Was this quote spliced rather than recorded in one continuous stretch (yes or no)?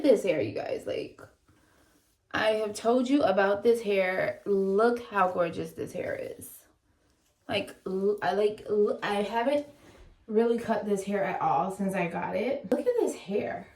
yes